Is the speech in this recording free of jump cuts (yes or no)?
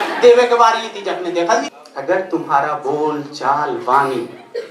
no